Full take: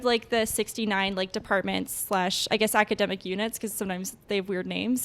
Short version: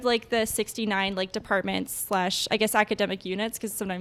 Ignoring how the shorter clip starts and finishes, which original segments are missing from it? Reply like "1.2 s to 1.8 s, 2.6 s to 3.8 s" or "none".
none

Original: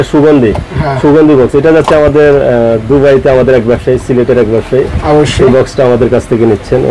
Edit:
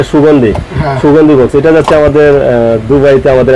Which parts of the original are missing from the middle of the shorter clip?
none

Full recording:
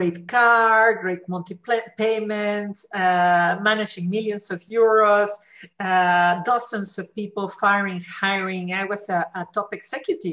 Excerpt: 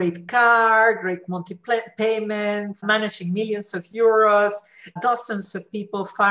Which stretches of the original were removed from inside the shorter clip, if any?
2.8 s to 3.6 s, 5.7 s to 6.4 s

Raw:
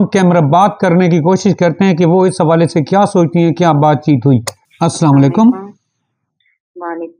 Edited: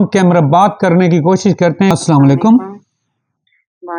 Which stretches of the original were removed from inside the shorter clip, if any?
1.9 s to 4.8 s

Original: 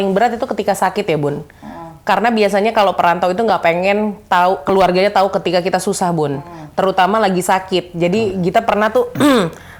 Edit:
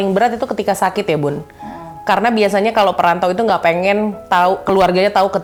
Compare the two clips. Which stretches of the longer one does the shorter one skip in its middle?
none

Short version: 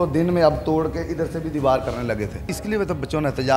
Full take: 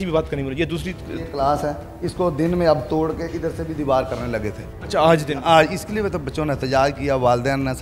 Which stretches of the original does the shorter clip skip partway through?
4.8 s to 5.8 s

